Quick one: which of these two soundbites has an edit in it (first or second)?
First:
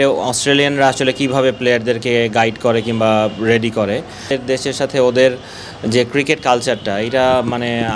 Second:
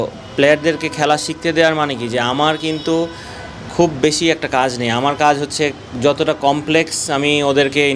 first